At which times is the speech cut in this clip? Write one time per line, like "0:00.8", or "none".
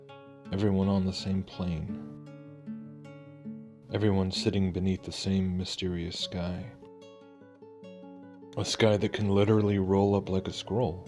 none